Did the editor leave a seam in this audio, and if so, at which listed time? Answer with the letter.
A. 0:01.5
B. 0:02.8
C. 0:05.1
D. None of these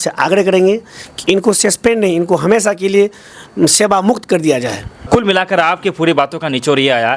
C